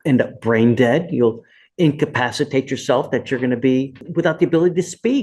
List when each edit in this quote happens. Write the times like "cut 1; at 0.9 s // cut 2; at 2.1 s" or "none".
cut 1; at 4.0 s